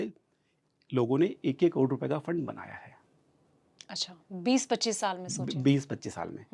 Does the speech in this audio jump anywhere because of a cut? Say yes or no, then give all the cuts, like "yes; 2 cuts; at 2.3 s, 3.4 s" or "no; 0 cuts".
no; 0 cuts